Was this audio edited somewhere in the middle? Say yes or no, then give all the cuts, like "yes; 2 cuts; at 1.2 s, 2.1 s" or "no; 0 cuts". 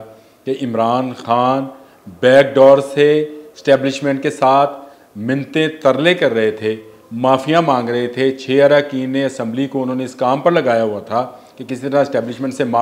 no; 0 cuts